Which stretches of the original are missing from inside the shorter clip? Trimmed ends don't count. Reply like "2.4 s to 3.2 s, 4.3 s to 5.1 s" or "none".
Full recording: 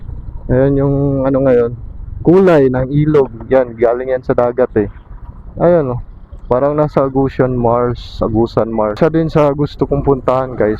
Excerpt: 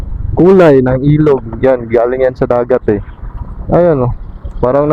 none